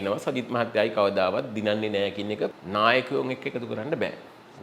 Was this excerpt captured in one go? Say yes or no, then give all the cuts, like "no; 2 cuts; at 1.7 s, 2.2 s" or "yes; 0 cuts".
no; 1 cut; at 2.6 s